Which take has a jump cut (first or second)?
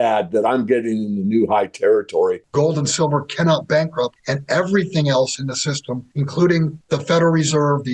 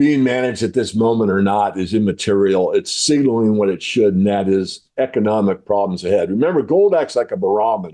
first